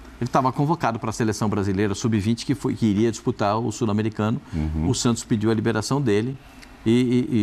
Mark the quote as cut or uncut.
uncut